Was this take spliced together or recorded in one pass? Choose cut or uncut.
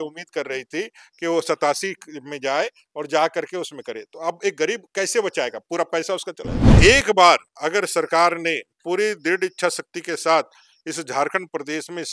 cut